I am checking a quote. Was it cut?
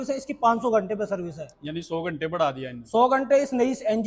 no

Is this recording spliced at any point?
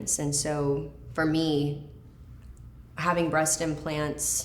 yes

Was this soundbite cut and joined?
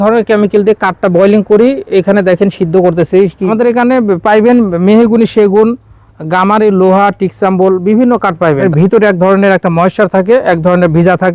yes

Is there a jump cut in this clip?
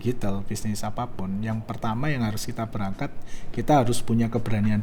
no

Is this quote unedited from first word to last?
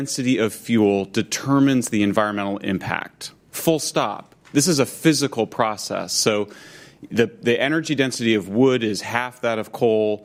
yes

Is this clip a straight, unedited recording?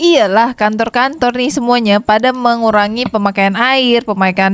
yes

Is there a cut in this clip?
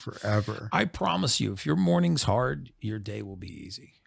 no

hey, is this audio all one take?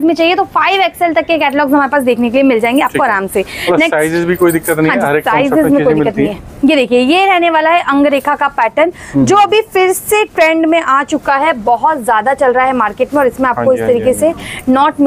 yes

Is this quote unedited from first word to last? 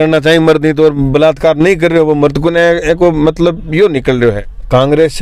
no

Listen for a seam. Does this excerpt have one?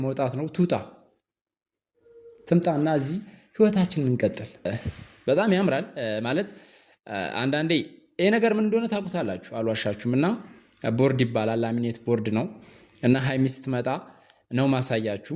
yes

